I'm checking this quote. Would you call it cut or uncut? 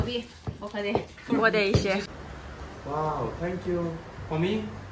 cut